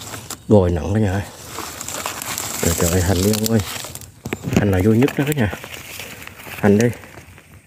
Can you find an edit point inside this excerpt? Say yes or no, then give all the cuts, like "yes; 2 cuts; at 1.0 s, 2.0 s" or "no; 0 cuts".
no; 0 cuts